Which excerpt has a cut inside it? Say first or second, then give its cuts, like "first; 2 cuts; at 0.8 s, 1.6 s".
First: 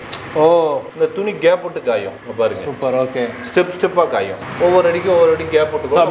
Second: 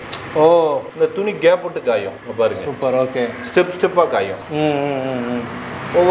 first; 1 cut; at 4.4 s